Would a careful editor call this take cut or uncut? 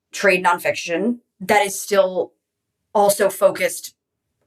cut